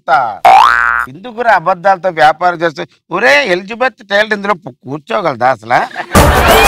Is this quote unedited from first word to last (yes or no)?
yes